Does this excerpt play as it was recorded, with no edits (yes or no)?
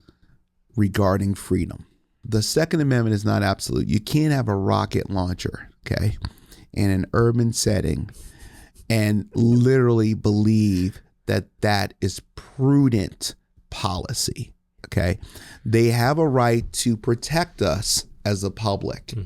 no